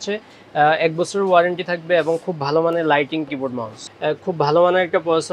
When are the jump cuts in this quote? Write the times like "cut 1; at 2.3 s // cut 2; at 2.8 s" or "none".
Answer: cut 1; at 3.8 s